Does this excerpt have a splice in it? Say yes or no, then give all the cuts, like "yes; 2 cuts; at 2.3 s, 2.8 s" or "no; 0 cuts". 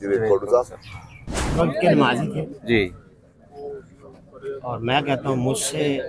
yes; 1 cut; at 1.5 s